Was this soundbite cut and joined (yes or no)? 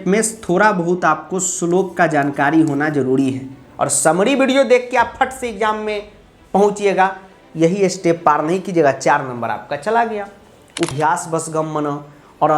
yes